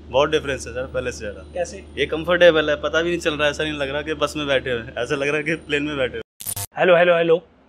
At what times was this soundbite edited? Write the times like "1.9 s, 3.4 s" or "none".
6.4 s